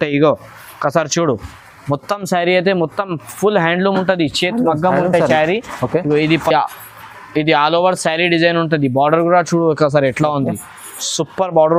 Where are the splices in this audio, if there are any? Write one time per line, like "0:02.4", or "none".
none